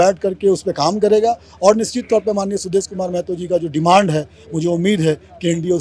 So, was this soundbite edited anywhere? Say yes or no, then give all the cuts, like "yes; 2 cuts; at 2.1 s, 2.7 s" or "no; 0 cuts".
no; 0 cuts